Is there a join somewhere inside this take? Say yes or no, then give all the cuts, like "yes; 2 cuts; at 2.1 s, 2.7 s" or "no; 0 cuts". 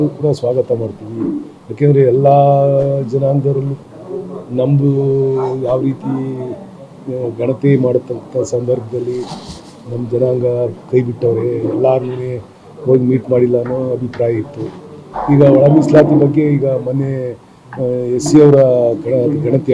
yes; 1 cut; at 3.8 s